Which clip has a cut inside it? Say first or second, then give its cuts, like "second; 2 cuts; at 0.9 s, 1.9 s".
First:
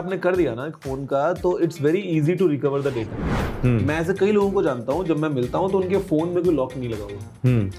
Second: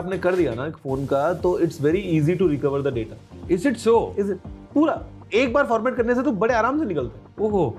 first; 1 cut; at 3.3 s